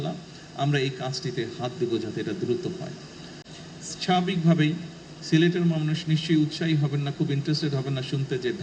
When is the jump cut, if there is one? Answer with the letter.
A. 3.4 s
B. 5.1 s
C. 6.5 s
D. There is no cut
A